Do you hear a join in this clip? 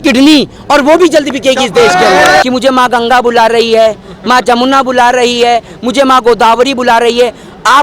yes; 1 cut; at 2.4 s

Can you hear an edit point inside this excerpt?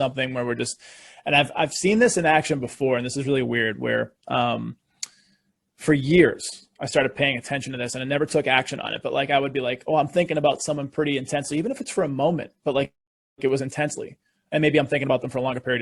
no; 0 cuts

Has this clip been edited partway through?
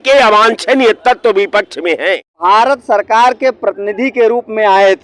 yes; 1 cut; at 2.3 s

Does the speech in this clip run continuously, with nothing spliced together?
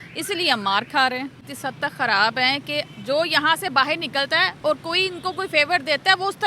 no; 1 cut; at 1.6 s

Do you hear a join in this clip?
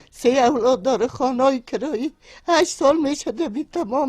yes; 1 cut; at 2.7 s

